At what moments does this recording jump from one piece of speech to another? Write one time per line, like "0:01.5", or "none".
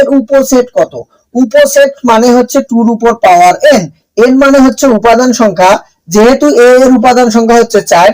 none